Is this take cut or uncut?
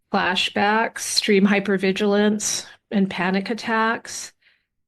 cut